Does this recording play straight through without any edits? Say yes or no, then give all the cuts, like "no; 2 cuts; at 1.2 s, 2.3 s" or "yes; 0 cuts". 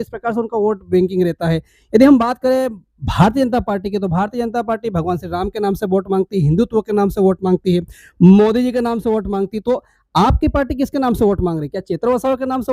yes; 0 cuts